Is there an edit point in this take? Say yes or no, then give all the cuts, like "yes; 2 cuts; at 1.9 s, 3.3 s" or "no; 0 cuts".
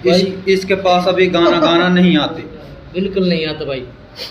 no; 0 cuts